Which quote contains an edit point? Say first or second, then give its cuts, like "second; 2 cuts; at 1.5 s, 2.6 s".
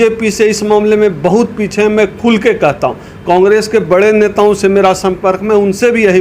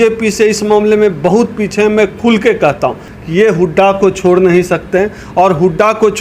second; 1 cut; at 3.1 s